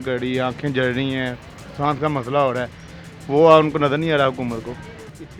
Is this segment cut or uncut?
uncut